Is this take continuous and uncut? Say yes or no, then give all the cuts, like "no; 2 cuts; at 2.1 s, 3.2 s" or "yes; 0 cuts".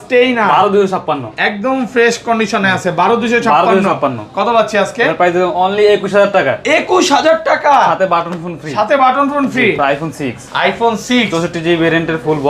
no; 1 cut; at 9.8 s